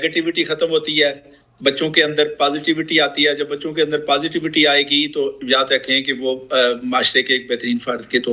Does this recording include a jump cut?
no; 0 cuts

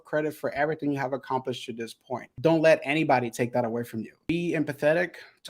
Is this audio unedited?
no; 2 cuts; at 2.3 s, 4.3 s

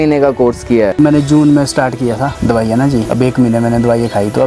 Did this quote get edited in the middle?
yes; 1 cut; at 1.0 s

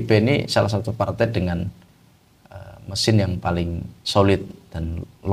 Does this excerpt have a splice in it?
no; 0 cuts

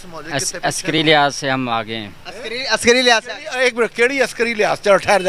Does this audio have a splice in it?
no; 0 cuts

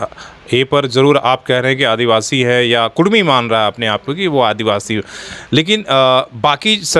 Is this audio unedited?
yes; 0 cuts

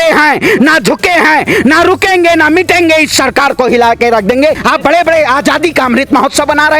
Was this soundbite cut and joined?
yes; 1 cut; at 4.6 s

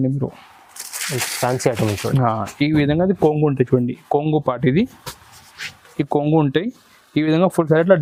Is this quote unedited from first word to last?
yes; 0 cuts

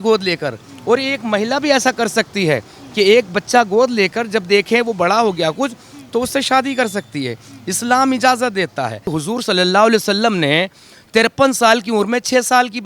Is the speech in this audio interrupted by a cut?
yes; 1 cut; at 9.1 s

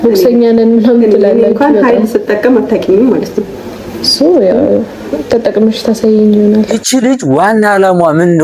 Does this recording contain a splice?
no; 0 cuts

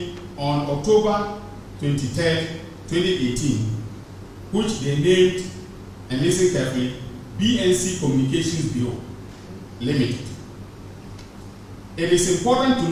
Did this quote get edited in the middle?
no; 0 cuts

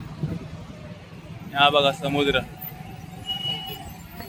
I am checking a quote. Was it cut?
no; 0 cuts

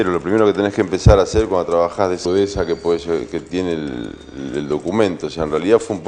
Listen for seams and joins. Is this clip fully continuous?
yes; 0 cuts

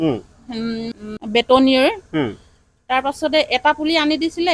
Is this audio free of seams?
yes; 0 cuts

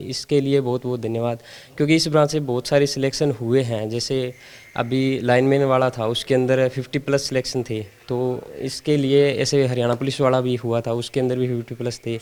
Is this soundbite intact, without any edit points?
yes; 0 cuts

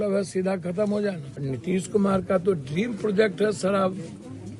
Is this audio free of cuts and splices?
no; 1 cut; at 1.3 s

